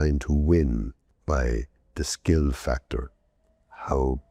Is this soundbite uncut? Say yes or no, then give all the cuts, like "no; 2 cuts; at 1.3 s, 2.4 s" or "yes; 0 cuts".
no; 1 cut; at 1.1 s